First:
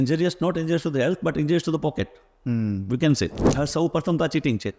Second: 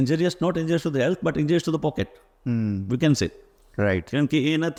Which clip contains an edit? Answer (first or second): first